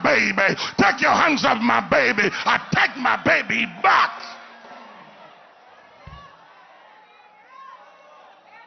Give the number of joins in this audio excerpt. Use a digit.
0